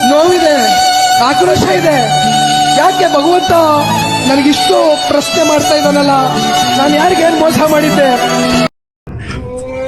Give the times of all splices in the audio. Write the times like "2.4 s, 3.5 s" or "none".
none